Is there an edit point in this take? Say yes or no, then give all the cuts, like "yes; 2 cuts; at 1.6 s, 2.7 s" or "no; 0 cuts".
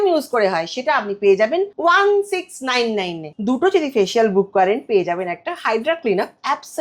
yes; 2 cuts; at 1.7 s, 3.2 s